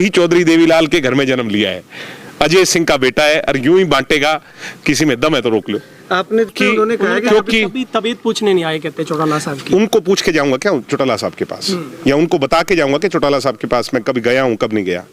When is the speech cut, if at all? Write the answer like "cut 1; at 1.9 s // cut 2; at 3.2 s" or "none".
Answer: cut 1; at 6.5 s